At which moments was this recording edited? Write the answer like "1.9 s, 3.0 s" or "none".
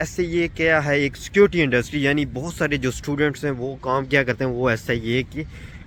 none